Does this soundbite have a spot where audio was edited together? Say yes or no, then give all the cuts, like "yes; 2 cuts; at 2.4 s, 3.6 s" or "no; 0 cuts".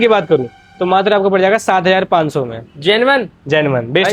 no; 0 cuts